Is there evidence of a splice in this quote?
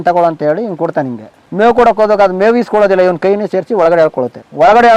no; 0 cuts

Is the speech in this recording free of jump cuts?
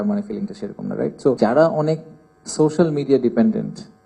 no; 1 cut; at 1.4 s

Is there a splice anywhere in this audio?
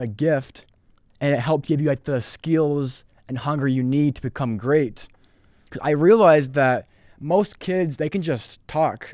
no; 0 cuts

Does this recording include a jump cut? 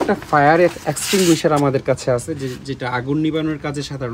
no; 0 cuts

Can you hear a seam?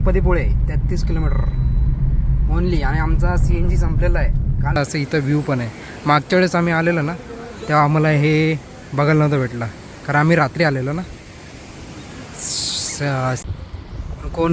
yes; 2 cuts; at 4.8 s, 13.4 s

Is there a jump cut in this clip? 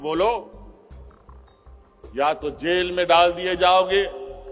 no; 0 cuts

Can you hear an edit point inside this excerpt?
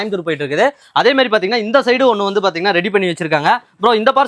no; 0 cuts

